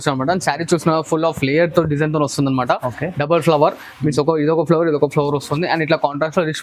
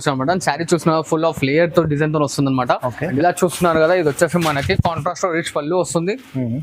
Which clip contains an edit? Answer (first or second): second